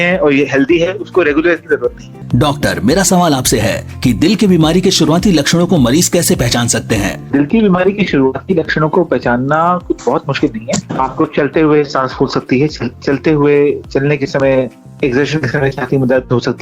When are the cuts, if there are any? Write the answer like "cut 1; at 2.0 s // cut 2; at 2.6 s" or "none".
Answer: cut 1; at 2.2 s // cut 2; at 3.5 s